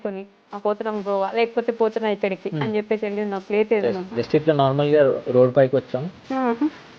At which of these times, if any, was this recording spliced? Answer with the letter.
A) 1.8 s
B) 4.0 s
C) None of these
B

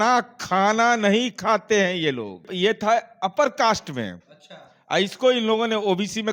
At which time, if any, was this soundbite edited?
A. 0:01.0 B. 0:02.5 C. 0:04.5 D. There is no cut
B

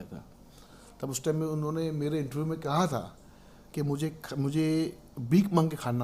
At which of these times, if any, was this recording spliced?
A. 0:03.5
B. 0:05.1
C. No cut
A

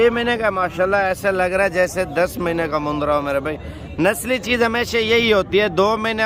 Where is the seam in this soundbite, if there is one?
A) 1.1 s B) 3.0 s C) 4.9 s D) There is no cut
D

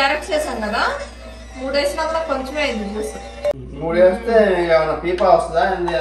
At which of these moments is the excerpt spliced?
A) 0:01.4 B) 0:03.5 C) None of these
B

